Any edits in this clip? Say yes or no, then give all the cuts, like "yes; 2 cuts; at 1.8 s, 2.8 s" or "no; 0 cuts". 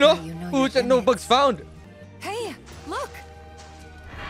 yes; 1 cut; at 1.8 s